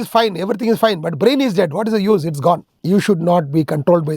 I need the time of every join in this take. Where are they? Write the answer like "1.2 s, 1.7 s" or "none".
2.7 s